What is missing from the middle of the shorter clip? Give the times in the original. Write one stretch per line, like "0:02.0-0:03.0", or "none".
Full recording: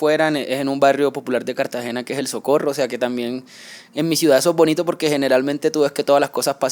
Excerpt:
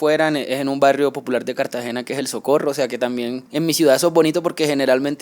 0:03.4-0:03.8